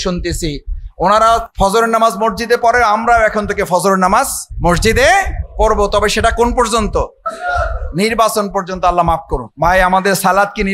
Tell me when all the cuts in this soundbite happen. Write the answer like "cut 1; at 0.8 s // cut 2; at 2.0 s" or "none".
cut 1; at 1.5 s // cut 2; at 4.4 s // cut 3; at 5.4 s // cut 4; at 7.3 s // cut 5; at 9.4 s